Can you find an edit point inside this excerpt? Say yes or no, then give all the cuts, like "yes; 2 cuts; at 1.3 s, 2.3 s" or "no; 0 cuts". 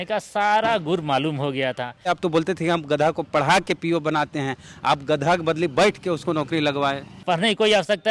yes; 2 cuts; at 2.1 s, 7.2 s